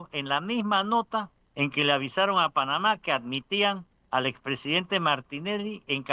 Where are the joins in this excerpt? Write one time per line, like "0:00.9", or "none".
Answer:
0:01.4
0:03.9